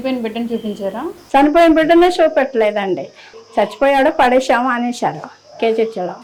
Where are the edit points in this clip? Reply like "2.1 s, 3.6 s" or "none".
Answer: none

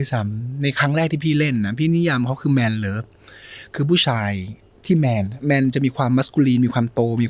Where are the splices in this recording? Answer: none

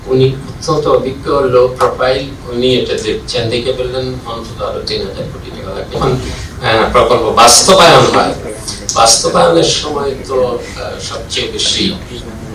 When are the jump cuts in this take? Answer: 5.9 s

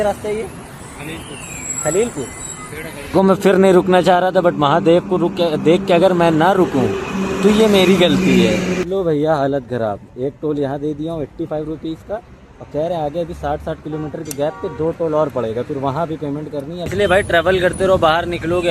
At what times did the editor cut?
3.1 s, 8.8 s, 16.9 s

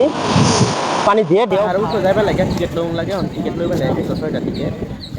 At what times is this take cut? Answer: 1.7 s

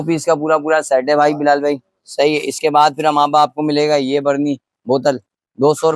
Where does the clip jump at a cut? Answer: none

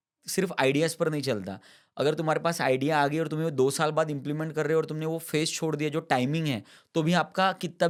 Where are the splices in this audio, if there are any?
none

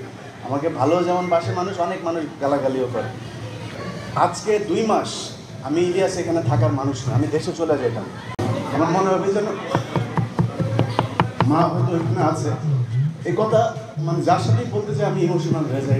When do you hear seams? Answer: 3.7 s, 8.4 s

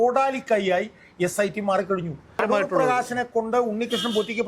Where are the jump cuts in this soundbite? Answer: 2.4 s

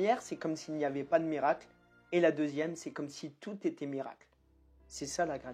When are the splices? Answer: none

